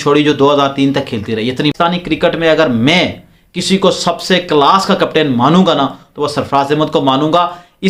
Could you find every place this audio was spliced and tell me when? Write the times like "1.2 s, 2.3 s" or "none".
1.7 s